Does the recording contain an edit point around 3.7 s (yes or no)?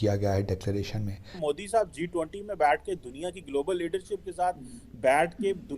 no